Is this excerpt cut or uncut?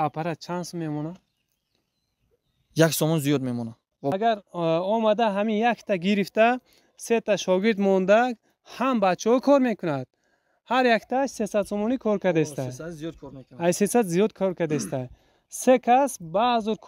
cut